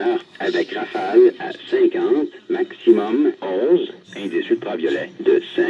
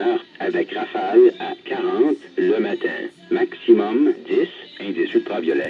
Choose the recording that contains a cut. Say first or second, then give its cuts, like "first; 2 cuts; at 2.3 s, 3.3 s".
second; 2 cuts; at 1.3 s, 2.2 s